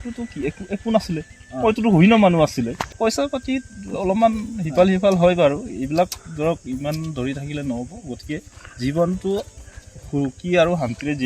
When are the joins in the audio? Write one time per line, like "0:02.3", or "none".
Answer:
0:02.8

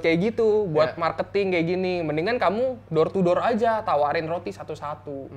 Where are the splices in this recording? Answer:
none

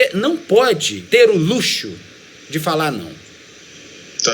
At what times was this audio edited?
0:00.9

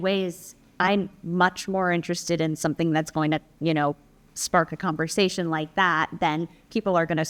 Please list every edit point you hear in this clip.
none

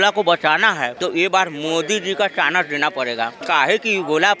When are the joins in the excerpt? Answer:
0:00.9
0:03.4

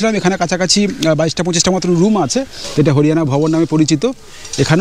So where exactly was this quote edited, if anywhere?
0:02.6

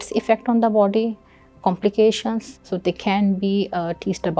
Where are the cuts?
0:02.5

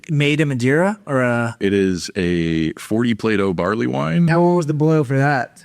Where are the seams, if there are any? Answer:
0:01.6
0:04.3

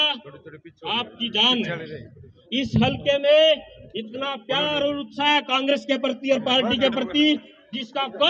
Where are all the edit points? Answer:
none

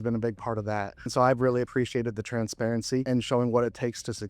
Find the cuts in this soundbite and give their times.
0:01.1
0:03.0

